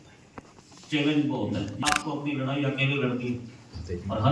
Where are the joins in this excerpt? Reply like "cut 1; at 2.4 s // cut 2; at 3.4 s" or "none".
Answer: cut 1; at 1.8 s